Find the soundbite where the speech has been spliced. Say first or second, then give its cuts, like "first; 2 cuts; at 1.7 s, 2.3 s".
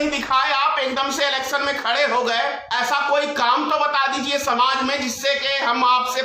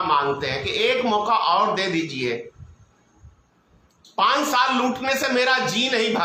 first; 1 cut; at 2.6 s